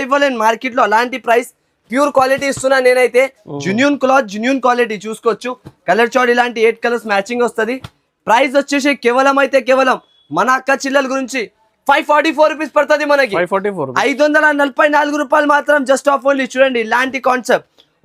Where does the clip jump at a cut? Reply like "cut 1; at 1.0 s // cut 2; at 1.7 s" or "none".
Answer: none